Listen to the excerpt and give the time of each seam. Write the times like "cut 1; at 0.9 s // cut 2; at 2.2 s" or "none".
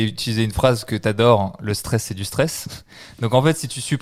none